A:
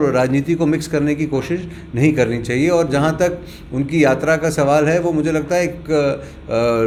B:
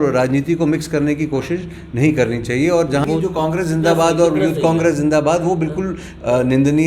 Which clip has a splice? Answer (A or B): B